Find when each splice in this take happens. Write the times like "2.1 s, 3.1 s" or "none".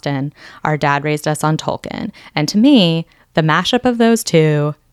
none